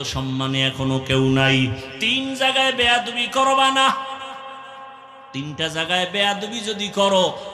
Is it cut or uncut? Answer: cut